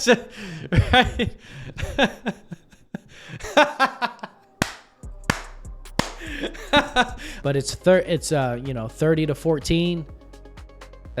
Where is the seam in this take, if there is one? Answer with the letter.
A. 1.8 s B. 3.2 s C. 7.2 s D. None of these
C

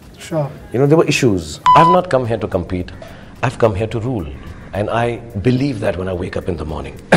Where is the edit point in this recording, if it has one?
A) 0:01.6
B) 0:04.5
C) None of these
A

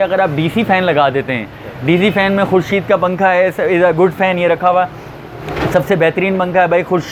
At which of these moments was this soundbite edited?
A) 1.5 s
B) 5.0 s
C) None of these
C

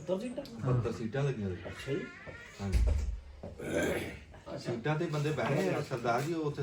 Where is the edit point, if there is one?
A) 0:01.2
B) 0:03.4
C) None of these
C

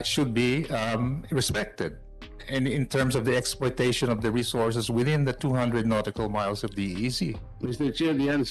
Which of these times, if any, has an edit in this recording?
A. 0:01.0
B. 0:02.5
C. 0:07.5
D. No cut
C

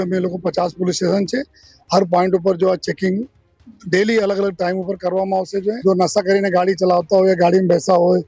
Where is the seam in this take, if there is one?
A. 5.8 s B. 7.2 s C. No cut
A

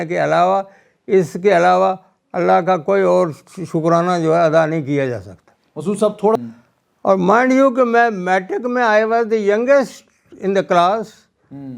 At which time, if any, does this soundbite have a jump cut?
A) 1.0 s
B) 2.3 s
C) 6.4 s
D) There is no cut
C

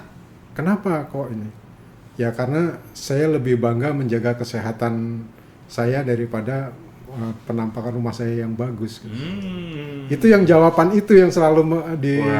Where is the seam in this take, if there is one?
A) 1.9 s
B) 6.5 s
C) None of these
C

